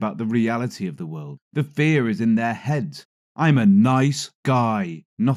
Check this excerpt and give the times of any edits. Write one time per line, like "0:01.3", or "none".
none